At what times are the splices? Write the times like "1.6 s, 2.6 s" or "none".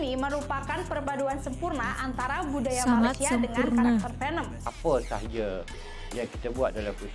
4.6 s